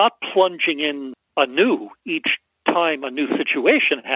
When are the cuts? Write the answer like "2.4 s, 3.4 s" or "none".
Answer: 1.1 s

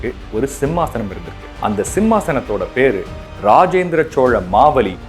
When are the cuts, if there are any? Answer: 1.5 s

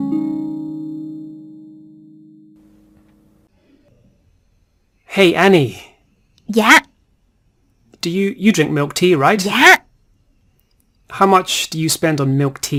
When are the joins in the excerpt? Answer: none

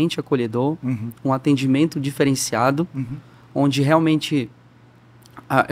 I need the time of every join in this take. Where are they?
none

